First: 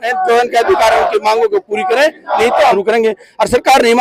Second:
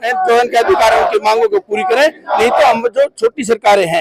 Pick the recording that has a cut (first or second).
first